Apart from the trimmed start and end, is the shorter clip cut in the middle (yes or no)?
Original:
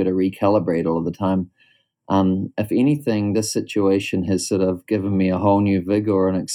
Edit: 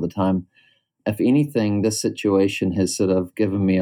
yes